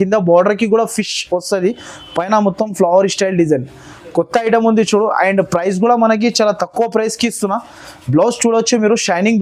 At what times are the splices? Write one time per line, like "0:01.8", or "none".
none